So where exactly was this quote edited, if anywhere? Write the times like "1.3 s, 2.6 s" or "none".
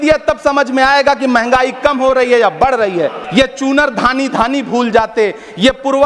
3.2 s

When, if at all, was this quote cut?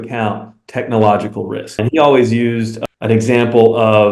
1.8 s

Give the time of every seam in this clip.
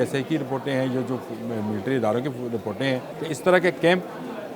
3.1 s

